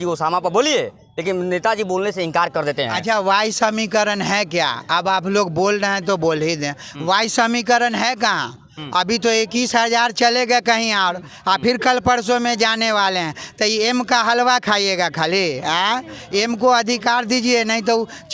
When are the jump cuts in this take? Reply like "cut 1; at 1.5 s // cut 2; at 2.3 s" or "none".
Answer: none

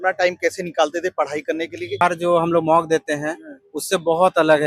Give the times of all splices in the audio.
cut 1; at 2.0 s

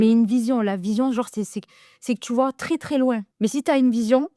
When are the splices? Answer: cut 1; at 3.3 s

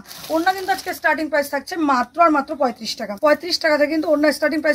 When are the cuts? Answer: none

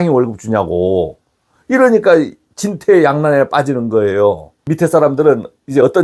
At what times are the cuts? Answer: cut 1; at 4.6 s

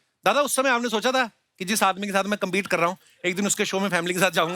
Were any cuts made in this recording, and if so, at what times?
none

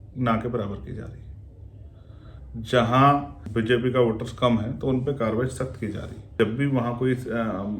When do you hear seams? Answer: cut 1; at 3.4 s // cut 2; at 6.3 s

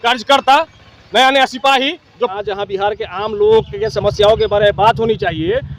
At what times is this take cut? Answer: cut 1; at 2.3 s

